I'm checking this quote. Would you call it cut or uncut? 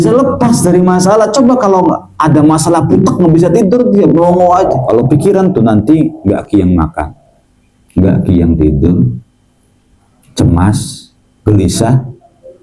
cut